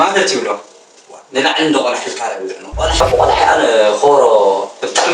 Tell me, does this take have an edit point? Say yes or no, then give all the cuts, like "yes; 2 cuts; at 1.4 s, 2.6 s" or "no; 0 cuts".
yes; 1 cut; at 3.0 s